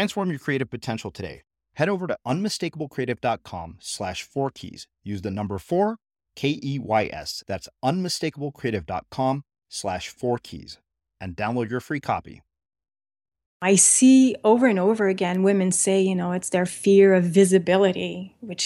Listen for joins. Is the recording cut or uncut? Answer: cut